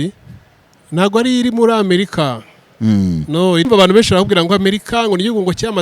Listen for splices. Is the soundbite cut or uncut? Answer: cut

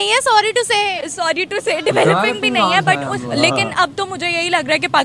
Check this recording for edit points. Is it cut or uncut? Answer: cut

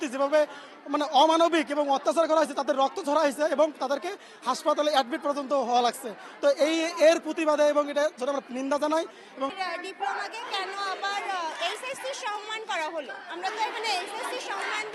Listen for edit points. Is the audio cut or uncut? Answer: cut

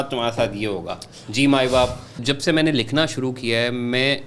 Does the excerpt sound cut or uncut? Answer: cut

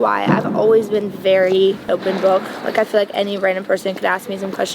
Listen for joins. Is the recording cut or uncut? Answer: cut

